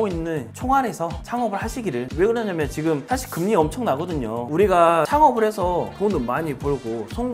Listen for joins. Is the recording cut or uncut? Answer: cut